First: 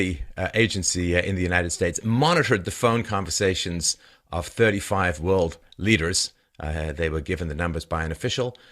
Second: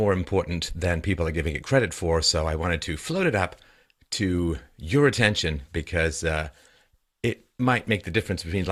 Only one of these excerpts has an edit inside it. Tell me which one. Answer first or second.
first